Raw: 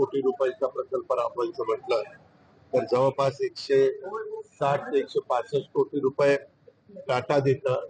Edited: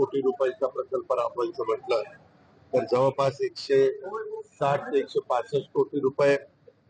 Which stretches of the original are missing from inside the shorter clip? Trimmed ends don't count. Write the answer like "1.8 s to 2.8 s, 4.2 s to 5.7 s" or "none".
none